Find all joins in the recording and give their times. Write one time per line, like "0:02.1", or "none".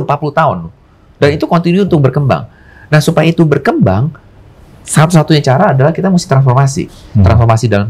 none

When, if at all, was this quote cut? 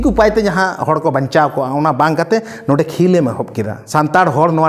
0:03.8

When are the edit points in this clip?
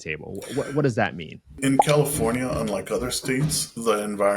0:01.5

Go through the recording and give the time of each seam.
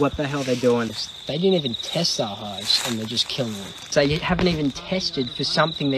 0:00.9
0:03.9

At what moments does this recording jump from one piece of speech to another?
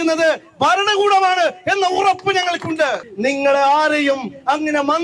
0:03.0

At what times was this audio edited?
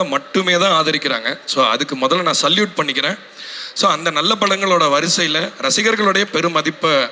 none

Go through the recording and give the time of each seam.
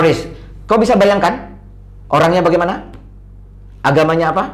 none

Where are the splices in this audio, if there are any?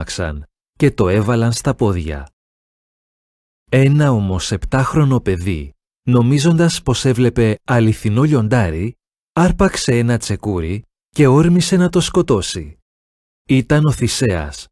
0:07.6

